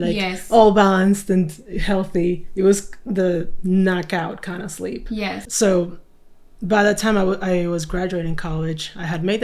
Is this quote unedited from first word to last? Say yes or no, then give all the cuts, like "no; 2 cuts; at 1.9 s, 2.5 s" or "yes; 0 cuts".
no; 1 cut; at 5.4 s